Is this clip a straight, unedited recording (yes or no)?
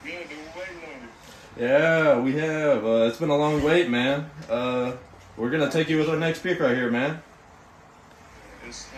yes